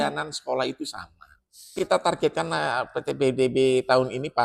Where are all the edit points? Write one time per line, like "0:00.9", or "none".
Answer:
0:01.7